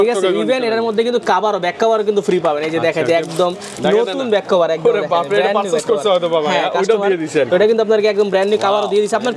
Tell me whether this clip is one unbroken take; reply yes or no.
yes